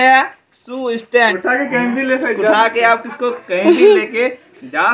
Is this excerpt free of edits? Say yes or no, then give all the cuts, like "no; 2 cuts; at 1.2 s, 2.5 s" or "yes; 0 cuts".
no; 1 cut; at 1.2 s